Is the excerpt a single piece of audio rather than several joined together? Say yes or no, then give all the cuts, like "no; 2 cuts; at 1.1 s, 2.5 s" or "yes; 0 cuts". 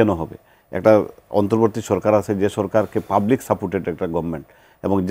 yes; 0 cuts